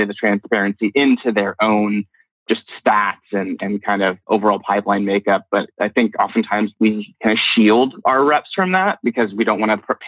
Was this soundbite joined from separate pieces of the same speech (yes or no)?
yes